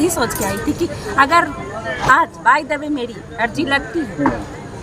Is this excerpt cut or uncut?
uncut